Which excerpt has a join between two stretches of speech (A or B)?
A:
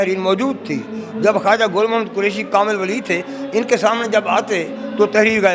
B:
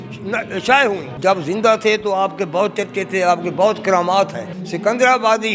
B